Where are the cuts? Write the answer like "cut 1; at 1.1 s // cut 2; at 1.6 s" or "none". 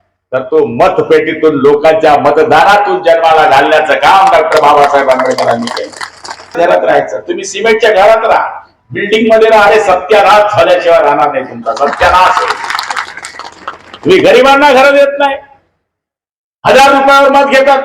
cut 1; at 6.6 s